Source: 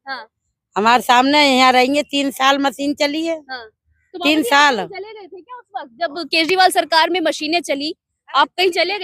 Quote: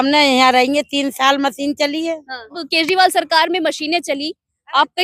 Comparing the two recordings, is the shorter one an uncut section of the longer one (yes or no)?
no